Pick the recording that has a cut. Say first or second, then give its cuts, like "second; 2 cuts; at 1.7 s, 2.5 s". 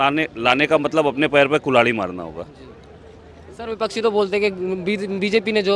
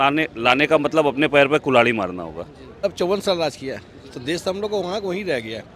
second; 1 cut; at 2.8 s